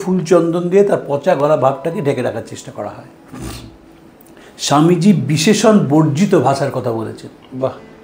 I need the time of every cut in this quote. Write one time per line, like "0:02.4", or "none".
none